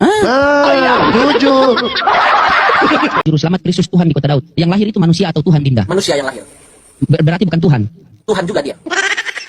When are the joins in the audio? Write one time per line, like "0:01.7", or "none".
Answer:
0:03.2